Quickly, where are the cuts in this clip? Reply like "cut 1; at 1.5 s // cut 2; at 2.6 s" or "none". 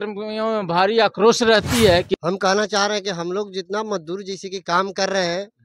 cut 1; at 2.1 s